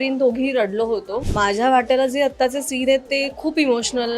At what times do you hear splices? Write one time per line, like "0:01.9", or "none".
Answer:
0:01.2